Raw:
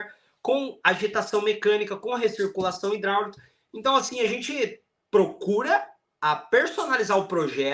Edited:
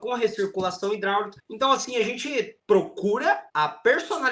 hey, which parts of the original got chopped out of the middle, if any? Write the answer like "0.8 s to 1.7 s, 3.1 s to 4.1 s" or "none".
3.4 s to 3.6 s, 4.8 s to 5.0 s, 5.9 s to 6.1 s